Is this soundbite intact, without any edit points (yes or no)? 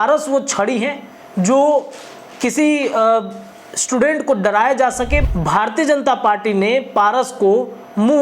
no